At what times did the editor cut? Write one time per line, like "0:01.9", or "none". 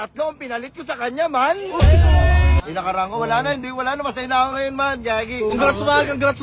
0:02.6
0:05.5